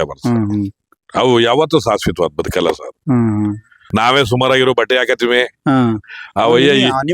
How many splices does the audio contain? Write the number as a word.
one